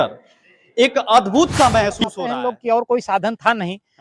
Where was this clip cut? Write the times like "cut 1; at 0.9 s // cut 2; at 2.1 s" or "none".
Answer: cut 1; at 2.1 s